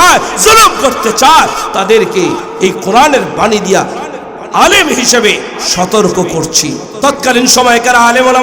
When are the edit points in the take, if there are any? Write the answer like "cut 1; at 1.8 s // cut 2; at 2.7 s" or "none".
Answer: cut 1; at 6.9 s